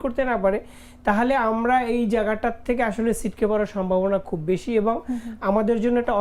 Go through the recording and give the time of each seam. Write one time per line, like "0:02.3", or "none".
none